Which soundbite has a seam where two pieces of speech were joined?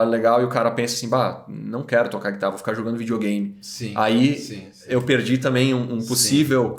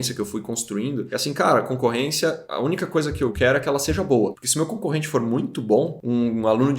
second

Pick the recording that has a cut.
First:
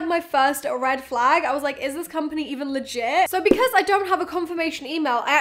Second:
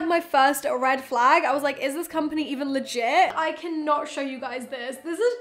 second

